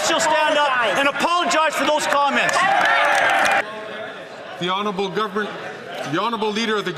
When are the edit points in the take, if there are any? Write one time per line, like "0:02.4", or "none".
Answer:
0:03.6